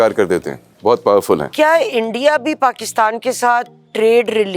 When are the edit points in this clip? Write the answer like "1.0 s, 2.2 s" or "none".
1.5 s